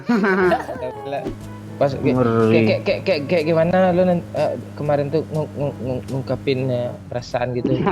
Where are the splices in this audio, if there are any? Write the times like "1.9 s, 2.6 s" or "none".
1.4 s